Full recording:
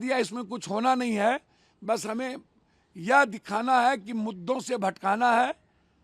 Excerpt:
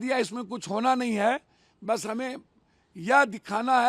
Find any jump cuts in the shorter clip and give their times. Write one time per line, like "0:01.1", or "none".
none

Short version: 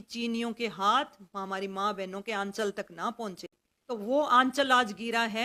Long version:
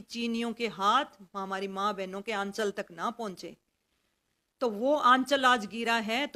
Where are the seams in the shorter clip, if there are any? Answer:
0:03.7

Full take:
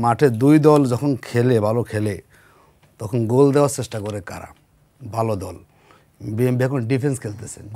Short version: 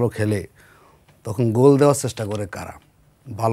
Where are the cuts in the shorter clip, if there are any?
none

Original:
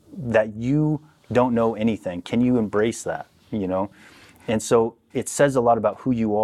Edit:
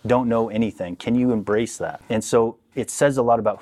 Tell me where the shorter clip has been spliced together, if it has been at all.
0:02.0

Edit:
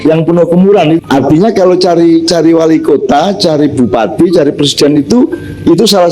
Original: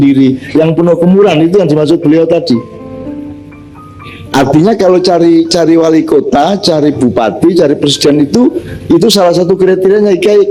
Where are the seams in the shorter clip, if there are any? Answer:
0:01.0

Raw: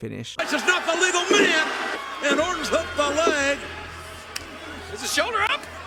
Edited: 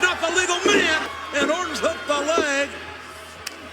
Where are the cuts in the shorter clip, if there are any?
0:01.1

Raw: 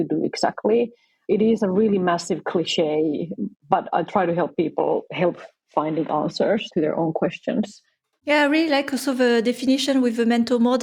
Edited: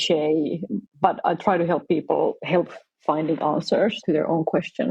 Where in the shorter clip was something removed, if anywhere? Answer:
none

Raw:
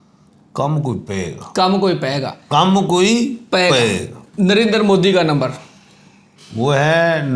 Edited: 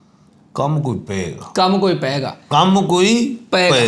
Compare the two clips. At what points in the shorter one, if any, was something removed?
none

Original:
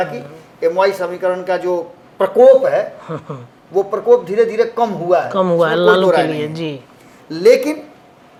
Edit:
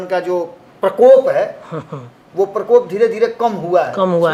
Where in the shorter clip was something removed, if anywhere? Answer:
none

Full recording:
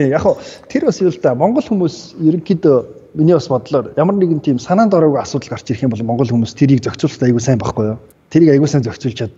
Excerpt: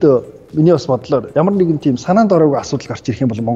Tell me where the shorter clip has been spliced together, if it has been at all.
none

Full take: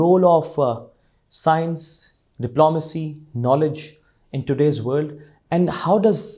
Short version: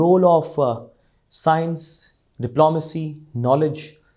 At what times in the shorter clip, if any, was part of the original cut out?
none

